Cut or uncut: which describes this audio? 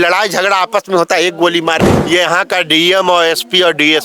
cut